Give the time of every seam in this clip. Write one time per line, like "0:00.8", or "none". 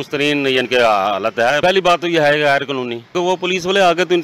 0:01.6
0:03.1